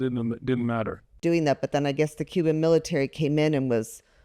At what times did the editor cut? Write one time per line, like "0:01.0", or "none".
0:01.2

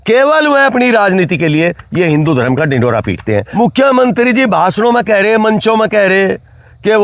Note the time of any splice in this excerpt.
0:03.5

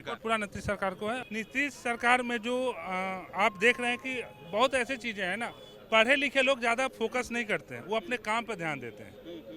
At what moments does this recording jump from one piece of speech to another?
0:01.2

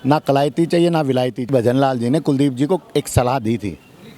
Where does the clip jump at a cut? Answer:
0:01.5

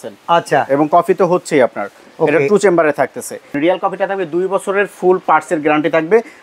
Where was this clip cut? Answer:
0:03.5

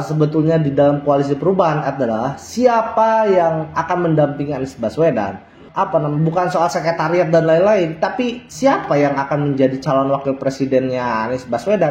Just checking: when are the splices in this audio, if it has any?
none

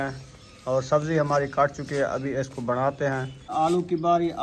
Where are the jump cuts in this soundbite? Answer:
0:03.5

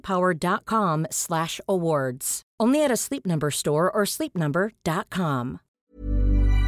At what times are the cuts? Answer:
0:05.8

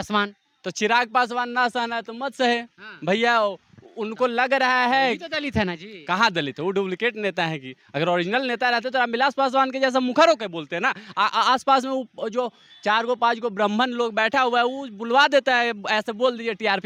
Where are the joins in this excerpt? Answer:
none

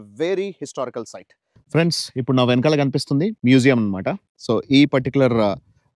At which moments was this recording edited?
0:01.6

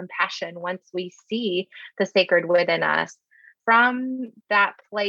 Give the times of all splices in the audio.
0:03.5

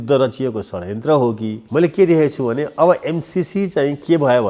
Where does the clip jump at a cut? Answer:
0:01.6

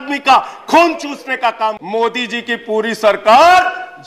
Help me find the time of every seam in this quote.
0:01.8

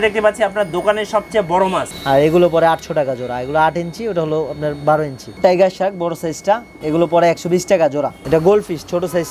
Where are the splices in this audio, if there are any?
0:01.9
0:05.2
0:06.7
0:08.2

